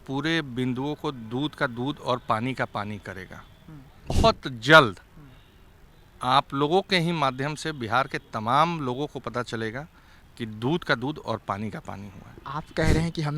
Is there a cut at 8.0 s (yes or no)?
no